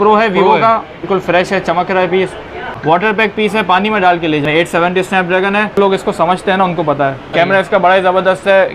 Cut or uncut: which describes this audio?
cut